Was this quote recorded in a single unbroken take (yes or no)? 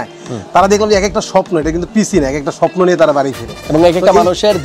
yes